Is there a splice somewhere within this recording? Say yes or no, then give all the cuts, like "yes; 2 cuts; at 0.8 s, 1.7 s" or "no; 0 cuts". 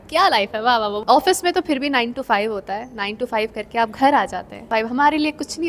yes; 2 cuts; at 1.0 s, 4.7 s